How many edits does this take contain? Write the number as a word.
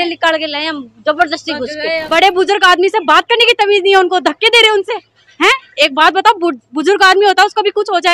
one